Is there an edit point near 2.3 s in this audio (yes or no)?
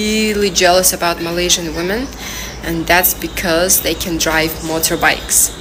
no